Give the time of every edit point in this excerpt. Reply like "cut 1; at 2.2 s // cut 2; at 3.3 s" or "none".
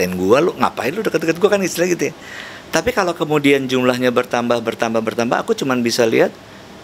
none